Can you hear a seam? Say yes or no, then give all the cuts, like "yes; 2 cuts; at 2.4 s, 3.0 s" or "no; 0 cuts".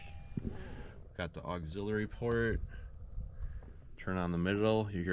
no; 0 cuts